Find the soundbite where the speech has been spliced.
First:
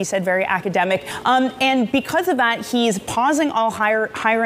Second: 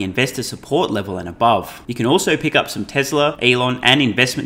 second; 2 cuts; at 1.8 s, 3.4 s

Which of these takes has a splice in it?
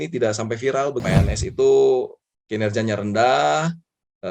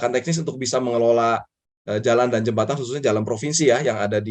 first; 1 cut; at 1.0 s

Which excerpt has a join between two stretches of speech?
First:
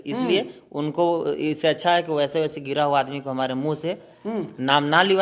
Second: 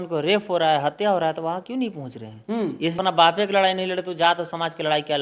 second; 1 cut; at 3.0 s

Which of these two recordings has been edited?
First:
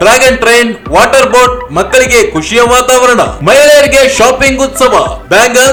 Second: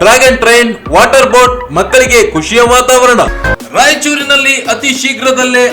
second; 1 cut; at 3.4 s

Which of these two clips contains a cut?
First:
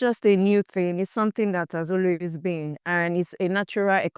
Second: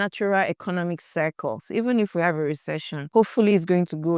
second; 1 cut; at 1.6 s

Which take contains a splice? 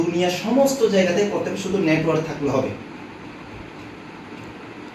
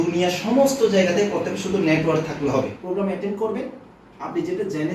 second; 1 cut; at 2.8 s

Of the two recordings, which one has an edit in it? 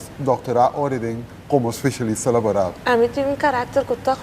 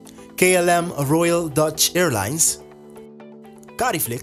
first; 1 cut; at 2.7 s

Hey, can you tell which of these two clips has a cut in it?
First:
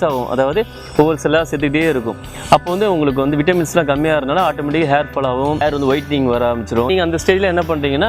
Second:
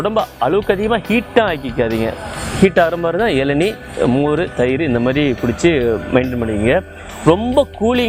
first; 2 cuts; at 5.6 s, 6.9 s

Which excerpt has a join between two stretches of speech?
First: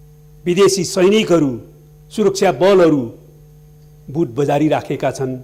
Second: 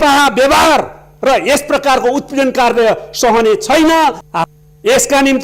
second; 1 cut; at 4.3 s

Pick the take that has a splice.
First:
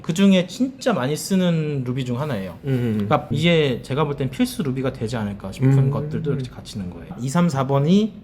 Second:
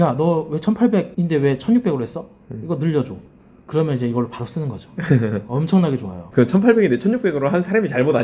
first; 2 cuts; at 3.3 s, 7.1 s

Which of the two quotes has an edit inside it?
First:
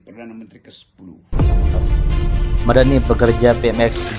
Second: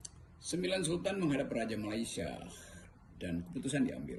first; 1 cut; at 1.3 s

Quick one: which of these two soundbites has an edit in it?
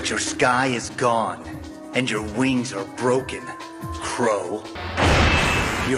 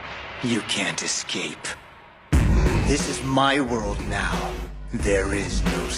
first; 1 cut; at 4.8 s

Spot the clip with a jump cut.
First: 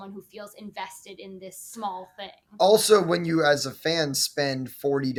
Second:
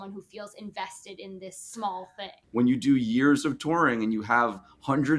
second; 1 cut; at 2.4 s

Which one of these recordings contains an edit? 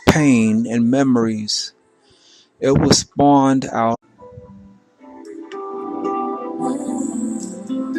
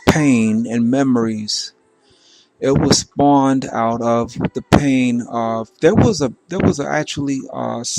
second; 1 cut; at 4.0 s

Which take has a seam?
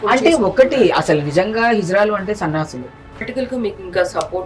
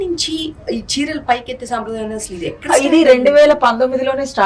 first; 1 cut; at 3.3 s

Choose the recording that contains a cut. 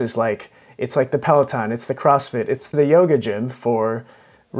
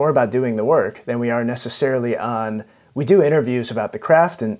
first; 1 cut; at 2.7 s

